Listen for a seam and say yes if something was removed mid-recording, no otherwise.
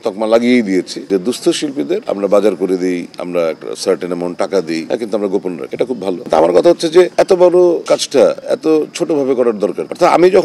no